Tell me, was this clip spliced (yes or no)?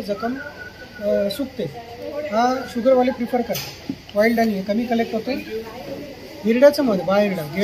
no